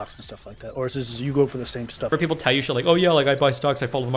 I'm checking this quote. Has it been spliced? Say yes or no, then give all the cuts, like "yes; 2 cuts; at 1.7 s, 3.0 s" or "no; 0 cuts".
yes; 1 cut; at 2.1 s